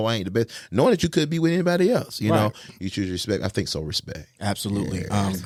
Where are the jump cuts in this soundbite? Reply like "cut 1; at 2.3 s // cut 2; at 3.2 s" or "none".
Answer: none